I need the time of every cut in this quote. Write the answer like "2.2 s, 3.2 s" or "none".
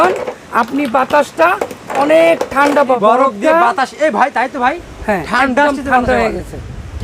3.0 s